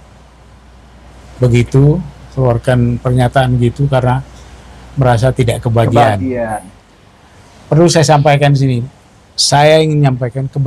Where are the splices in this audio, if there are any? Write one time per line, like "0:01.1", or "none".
none